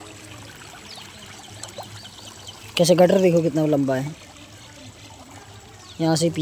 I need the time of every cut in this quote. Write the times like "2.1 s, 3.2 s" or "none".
none

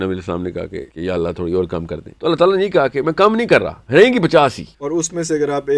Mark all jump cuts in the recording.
0.9 s, 2.0 s, 3.8 s, 4.7 s

